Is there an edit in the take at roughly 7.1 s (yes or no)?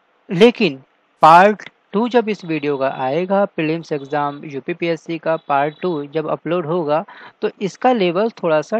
no